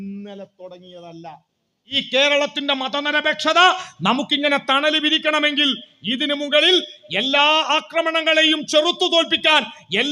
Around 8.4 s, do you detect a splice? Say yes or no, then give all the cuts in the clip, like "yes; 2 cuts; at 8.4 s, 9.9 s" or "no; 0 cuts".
no; 1 cut; at 2.0 s